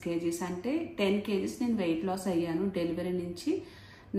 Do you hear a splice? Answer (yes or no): no